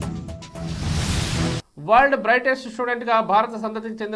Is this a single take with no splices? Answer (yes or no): no